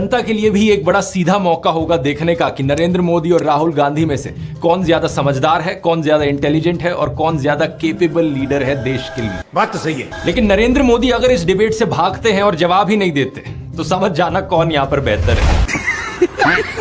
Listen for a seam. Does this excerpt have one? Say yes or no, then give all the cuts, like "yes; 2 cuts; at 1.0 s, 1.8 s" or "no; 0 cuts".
no; 0 cuts